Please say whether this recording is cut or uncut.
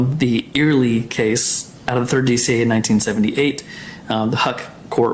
uncut